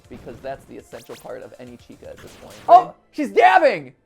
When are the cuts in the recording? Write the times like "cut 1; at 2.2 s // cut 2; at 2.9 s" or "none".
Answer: cut 1; at 2.5 s

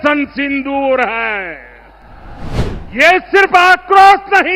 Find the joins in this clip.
cut 1; at 2.6 s

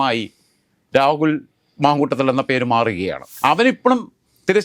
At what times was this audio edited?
cut 1; at 3.2 s

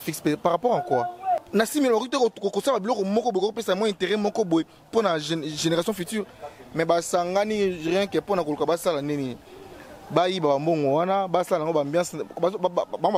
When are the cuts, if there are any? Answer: cut 1; at 1.4 s

